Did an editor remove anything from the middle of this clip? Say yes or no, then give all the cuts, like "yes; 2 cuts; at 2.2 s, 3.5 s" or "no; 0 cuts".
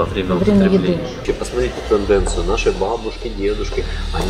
yes; 1 cut; at 1.2 s